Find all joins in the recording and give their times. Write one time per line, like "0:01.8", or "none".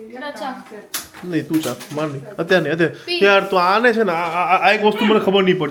none